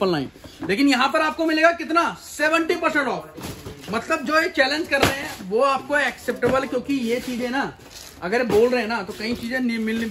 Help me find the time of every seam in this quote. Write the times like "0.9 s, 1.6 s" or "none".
none